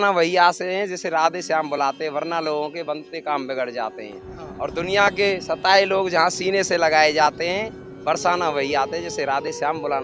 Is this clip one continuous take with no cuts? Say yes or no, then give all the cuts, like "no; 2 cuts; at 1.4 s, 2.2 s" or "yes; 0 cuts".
yes; 0 cuts